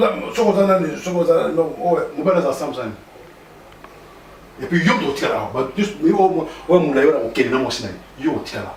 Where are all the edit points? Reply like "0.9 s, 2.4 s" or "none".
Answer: none